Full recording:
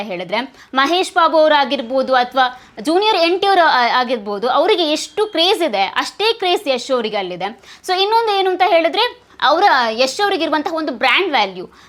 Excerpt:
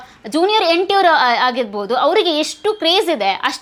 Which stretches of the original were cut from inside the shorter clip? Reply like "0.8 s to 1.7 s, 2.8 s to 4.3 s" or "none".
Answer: none